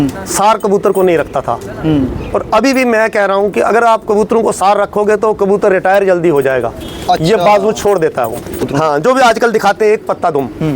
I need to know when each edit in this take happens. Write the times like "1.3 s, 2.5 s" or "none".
8.7 s